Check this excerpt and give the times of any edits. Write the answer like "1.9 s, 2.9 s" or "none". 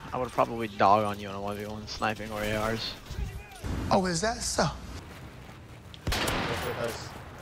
3.6 s, 5.0 s